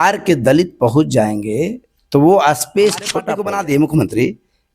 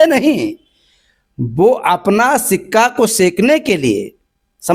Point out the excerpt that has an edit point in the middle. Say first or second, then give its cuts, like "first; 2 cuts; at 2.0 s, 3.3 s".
first; 1 cut; at 3.2 s